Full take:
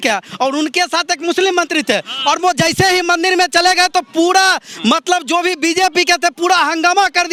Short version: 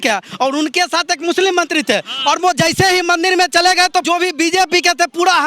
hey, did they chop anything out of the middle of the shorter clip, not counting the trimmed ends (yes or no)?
yes